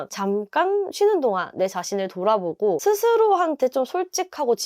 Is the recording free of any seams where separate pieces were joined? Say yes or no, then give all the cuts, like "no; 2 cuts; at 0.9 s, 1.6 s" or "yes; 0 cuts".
no; 1 cut; at 2.8 s